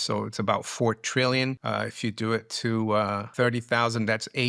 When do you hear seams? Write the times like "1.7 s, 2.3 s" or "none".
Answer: 1.6 s, 3.2 s